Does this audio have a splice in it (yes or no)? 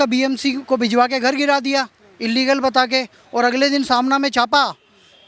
no